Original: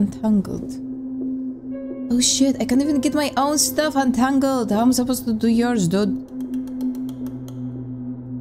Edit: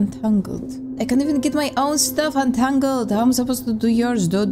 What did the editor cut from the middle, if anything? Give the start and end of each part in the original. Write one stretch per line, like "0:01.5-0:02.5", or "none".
0:01.0-0:02.6